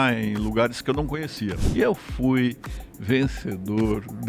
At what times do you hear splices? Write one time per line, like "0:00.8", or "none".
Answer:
0:01.7